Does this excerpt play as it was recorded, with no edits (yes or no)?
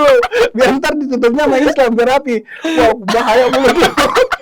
yes